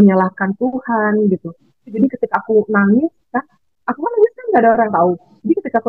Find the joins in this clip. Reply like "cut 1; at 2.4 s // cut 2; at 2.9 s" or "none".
cut 1; at 2.0 s